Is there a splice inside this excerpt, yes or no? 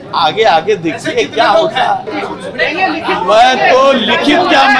yes